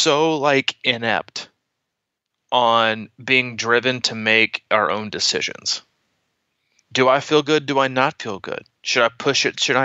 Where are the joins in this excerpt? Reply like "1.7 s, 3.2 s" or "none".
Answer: none